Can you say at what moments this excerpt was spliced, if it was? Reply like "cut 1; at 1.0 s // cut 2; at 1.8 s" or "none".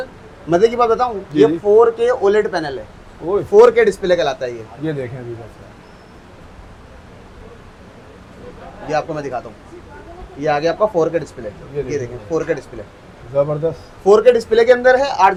none